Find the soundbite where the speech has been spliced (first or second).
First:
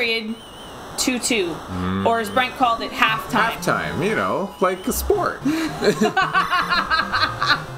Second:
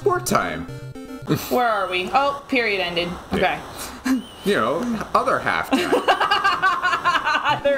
second